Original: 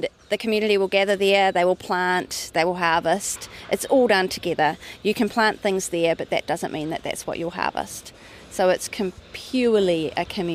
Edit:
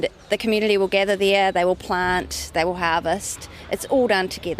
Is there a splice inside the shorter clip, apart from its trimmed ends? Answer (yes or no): no